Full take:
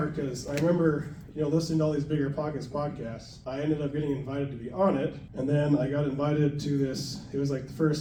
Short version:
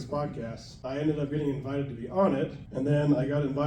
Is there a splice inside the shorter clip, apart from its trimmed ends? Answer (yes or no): no